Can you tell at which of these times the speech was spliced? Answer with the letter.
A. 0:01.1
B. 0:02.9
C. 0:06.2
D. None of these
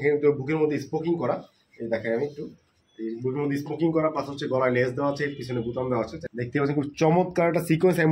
C